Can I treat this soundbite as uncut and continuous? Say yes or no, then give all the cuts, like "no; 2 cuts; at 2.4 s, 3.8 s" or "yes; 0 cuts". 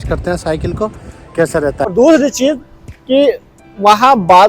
no; 1 cut; at 1.9 s